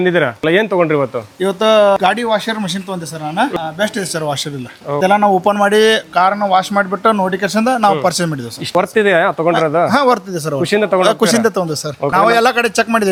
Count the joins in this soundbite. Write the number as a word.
zero